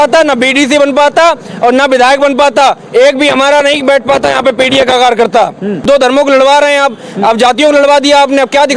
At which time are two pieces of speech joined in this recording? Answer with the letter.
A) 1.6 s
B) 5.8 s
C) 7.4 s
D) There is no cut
B